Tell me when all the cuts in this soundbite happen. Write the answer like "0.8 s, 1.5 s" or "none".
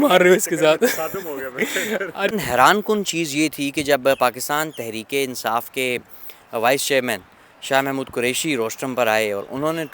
2.3 s